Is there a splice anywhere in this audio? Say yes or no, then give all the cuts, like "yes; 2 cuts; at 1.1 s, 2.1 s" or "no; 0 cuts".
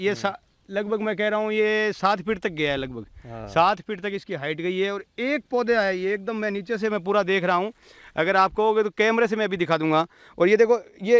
no; 0 cuts